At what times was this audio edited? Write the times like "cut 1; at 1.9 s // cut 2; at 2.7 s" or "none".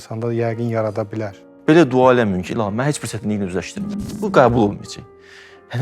cut 1; at 1.4 s // cut 2; at 4.2 s